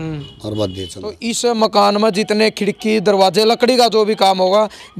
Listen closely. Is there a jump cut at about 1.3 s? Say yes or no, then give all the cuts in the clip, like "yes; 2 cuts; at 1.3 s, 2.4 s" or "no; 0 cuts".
yes; 1 cut; at 1.3 s